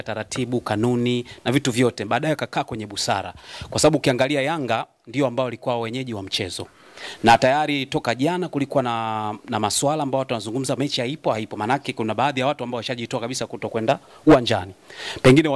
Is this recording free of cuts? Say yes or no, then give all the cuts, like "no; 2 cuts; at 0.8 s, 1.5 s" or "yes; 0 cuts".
yes; 0 cuts